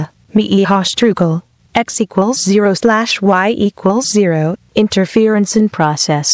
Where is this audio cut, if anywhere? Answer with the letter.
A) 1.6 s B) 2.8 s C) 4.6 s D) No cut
C